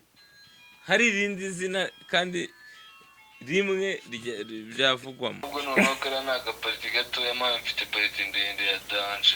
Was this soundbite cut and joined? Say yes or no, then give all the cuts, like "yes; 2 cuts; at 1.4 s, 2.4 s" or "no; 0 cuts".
yes; 1 cut; at 5.4 s